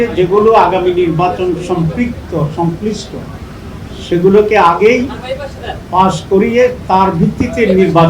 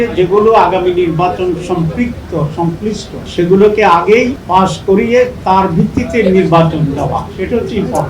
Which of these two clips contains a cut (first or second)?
second